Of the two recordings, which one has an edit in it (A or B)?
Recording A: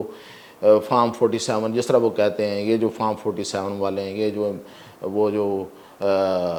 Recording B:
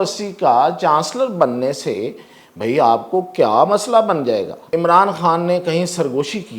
B